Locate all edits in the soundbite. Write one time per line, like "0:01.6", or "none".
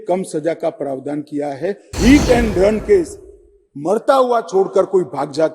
0:01.9